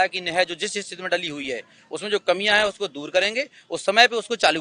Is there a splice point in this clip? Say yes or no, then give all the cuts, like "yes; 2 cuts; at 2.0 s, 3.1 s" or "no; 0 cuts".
no; 0 cuts